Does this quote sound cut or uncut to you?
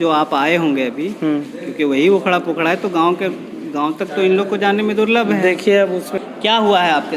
cut